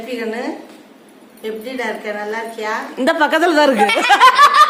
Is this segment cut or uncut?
uncut